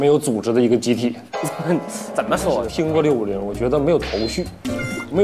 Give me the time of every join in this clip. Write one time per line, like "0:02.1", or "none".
0:02.7